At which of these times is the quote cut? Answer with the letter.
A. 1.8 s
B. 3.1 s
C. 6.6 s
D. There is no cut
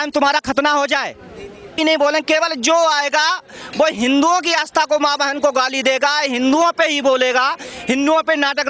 D